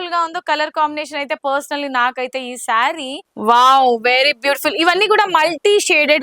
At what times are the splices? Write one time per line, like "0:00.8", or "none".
0:03.2